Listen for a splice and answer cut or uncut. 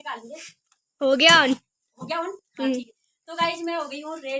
uncut